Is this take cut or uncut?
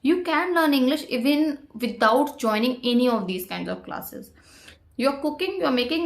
cut